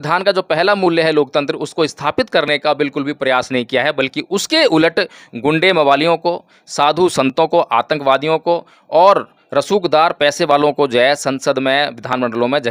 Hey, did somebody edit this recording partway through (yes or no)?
no